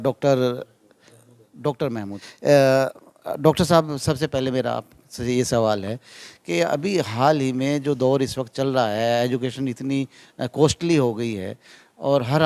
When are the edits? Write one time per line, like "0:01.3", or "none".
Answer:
0:01.1
0:02.2